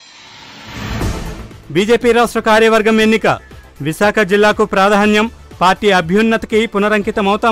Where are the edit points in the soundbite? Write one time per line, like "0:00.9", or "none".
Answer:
0:01.0